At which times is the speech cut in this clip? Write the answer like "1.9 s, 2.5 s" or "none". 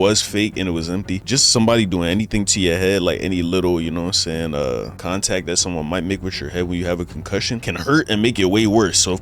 none